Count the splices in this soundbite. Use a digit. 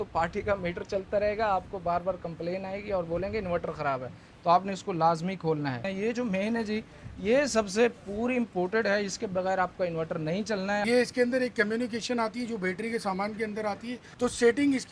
3